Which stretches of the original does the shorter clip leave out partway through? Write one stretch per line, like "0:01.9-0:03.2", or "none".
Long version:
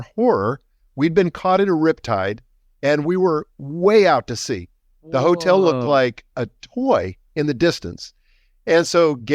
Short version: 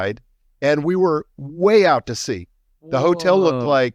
none